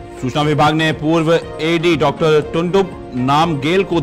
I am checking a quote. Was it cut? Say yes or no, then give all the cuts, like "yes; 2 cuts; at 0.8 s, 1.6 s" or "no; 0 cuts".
no; 0 cuts